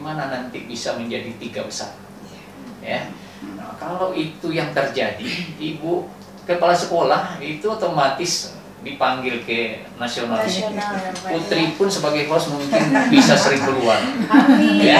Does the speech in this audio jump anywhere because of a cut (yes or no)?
no